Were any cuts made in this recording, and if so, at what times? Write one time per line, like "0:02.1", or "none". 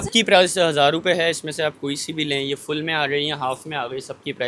none